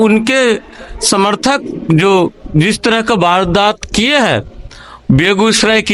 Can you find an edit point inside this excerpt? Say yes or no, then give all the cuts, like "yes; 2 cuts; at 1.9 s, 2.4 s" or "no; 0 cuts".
no; 0 cuts